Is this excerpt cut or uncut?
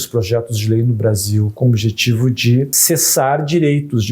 cut